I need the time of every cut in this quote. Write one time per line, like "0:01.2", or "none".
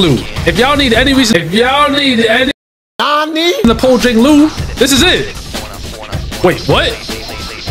none